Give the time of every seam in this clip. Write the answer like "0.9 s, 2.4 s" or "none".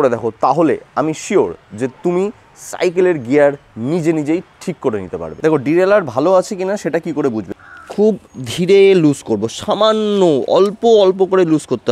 5.3 s, 7.5 s